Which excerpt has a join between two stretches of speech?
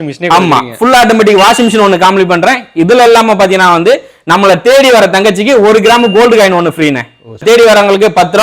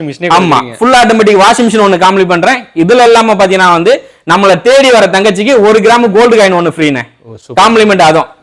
first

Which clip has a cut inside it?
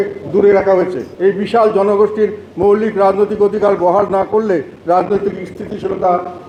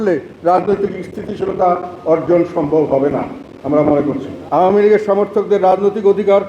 second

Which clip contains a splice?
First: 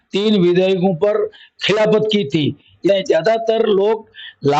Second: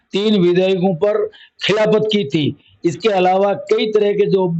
first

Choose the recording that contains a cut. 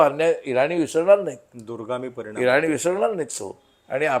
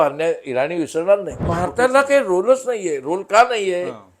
second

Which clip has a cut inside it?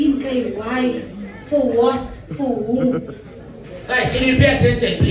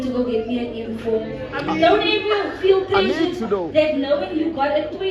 first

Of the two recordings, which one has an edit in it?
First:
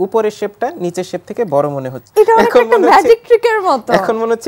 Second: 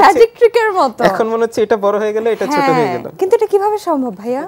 first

